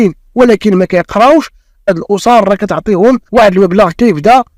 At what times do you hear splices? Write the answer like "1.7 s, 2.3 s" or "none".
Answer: 1.9 s